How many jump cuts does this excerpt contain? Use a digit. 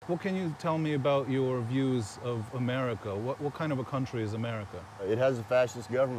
1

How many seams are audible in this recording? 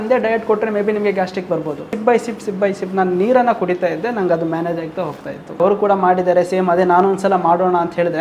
2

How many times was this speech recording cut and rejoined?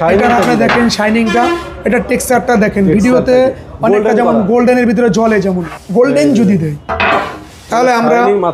1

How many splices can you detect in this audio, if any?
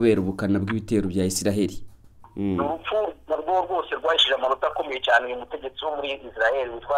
1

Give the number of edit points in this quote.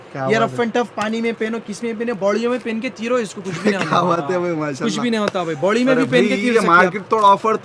0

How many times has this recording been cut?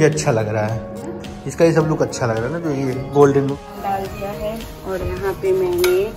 1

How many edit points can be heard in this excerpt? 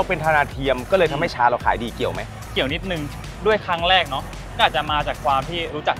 0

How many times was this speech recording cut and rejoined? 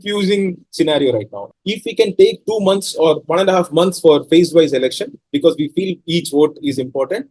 1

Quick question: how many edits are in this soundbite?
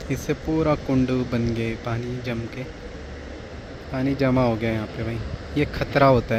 0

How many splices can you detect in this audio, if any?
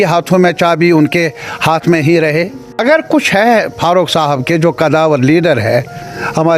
1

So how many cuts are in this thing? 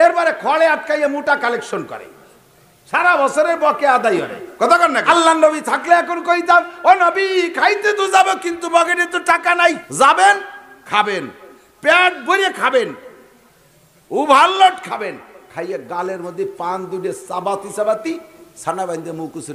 2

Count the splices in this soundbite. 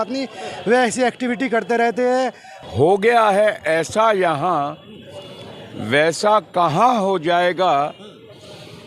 1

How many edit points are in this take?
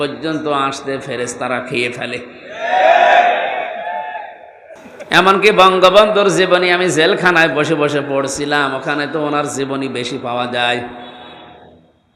0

